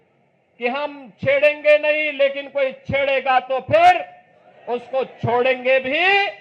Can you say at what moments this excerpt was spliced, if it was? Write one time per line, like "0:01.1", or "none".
none